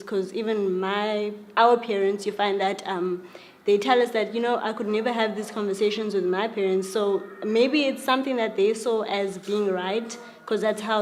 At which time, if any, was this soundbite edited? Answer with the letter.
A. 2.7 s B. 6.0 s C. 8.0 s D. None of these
D